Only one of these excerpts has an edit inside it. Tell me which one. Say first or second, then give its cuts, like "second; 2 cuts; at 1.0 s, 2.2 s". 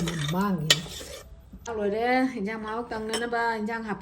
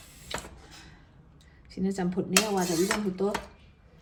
first; 1 cut; at 1.7 s